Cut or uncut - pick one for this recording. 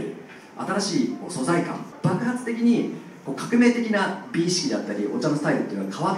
cut